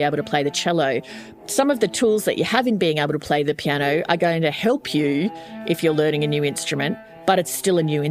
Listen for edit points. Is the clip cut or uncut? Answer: uncut